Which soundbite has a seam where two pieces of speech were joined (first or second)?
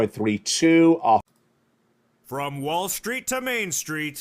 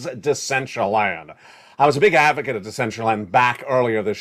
first